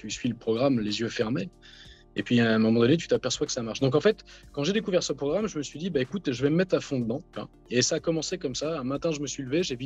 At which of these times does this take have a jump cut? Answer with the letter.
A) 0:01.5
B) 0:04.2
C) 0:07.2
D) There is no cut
D